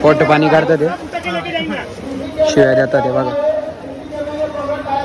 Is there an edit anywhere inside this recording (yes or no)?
no